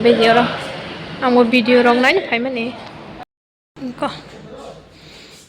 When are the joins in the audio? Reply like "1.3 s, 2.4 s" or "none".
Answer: 3.3 s